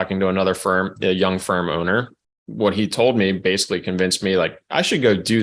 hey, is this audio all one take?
no; 1 cut; at 2.2 s

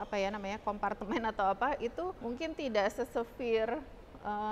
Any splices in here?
yes; 1 cut; at 2.2 s

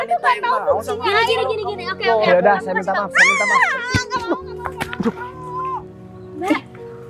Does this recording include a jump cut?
no; 0 cuts

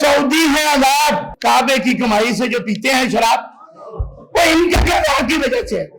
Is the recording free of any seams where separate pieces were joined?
no; 1 cut; at 1.3 s

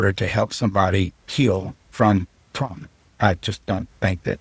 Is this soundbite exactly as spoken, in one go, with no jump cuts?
yes; 0 cuts

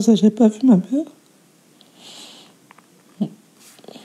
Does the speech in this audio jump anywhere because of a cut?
no; 0 cuts

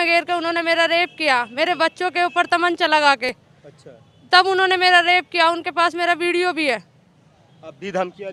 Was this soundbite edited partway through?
no; 0 cuts

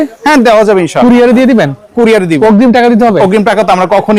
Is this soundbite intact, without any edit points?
yes; 0 cuts

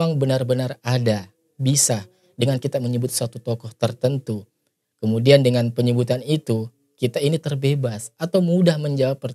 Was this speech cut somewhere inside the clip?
no; 0 cuts

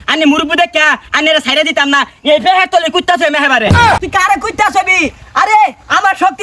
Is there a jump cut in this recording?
yes; 1 cut; at 3.8 s

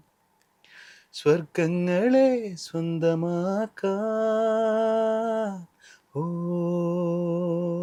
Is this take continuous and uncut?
yes; 0 cuts

